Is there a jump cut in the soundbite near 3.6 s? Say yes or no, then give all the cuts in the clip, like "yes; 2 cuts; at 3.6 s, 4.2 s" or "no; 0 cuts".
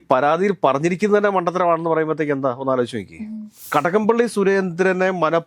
yes; 1 cut; at 3.6 s